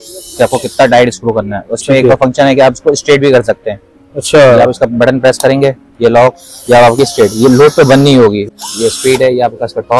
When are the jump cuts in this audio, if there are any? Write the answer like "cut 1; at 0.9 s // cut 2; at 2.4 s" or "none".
cut 1; at 8.5 s